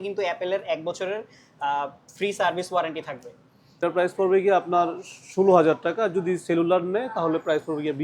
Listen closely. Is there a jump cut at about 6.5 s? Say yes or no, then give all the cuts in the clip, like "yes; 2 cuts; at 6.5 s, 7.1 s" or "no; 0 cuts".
no; 1 cut; at 3.8 s